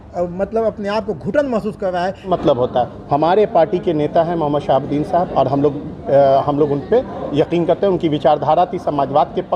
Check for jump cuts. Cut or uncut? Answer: cut